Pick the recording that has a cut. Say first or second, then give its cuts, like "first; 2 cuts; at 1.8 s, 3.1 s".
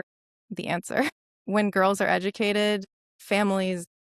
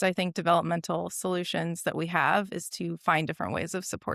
first; 1 cut; at 1.5 s